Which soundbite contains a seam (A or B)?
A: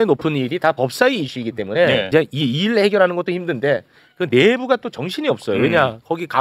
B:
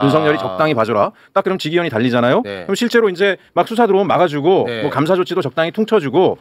A